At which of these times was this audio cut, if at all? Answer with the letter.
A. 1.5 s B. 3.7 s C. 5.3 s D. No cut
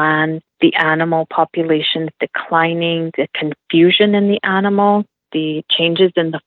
C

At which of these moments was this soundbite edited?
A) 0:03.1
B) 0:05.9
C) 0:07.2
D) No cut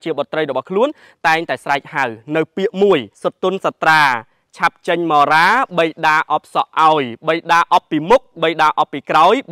A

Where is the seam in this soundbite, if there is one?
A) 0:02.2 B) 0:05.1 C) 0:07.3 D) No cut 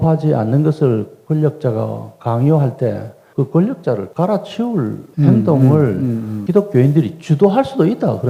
D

